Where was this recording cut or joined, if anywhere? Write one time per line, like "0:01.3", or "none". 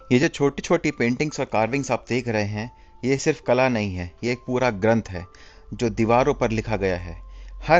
none

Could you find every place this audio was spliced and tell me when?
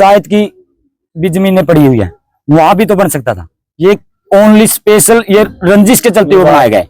none

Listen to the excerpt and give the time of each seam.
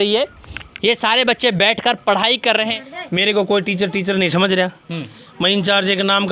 0:02.7

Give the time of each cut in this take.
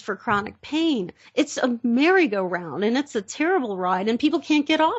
none

